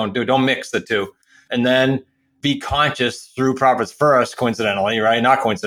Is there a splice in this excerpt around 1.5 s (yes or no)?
yes